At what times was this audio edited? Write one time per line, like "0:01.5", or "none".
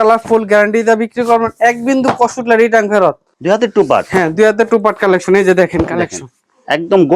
0:03.3